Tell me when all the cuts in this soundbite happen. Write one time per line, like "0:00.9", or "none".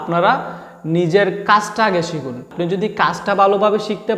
0:02.5